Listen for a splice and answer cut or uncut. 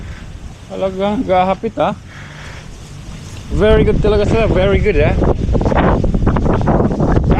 cut